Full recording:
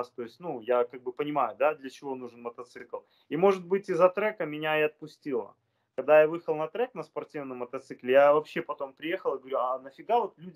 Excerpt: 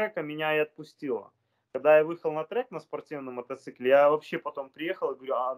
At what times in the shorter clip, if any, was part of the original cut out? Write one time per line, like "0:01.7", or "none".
none